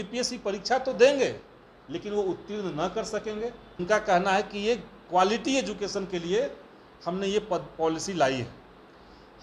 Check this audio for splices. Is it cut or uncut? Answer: cut